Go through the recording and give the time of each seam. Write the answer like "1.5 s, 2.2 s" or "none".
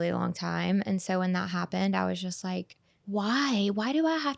2.9 s

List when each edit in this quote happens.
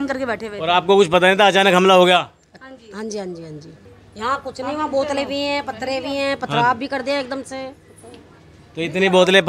none

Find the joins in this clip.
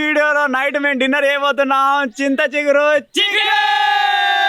none

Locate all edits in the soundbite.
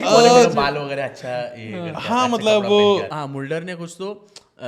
3.1 s

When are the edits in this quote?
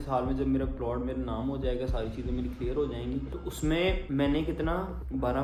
none

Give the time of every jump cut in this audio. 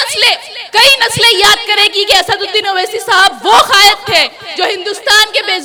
none

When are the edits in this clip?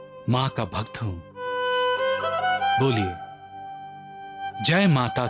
none

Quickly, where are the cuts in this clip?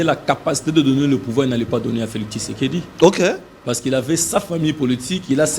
none

